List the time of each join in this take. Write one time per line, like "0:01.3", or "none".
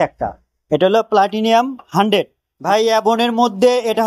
0:02.5